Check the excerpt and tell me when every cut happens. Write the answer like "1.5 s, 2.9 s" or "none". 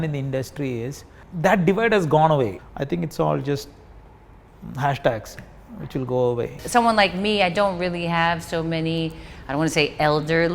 2.6 s, 6.6 s